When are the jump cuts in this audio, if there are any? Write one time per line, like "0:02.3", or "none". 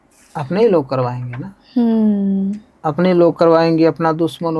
none